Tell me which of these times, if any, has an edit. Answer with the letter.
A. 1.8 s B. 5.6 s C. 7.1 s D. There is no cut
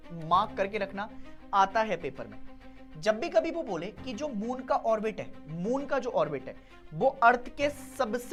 D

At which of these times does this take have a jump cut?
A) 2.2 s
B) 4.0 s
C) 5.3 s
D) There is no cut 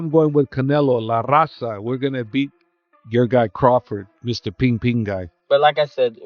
C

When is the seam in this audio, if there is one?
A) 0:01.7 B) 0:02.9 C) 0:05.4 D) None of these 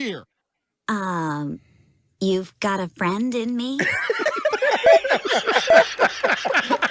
D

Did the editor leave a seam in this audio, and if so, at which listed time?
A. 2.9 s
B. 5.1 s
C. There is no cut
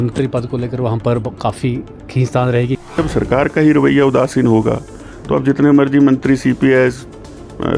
A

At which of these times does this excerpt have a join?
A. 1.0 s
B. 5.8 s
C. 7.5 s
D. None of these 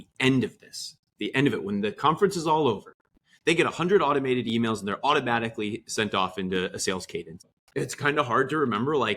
C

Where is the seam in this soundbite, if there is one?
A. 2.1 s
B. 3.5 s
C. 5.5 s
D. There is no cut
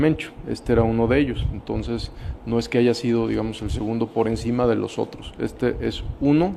D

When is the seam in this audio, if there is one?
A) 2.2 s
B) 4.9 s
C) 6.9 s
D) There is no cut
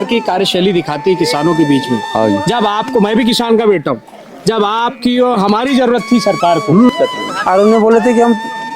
C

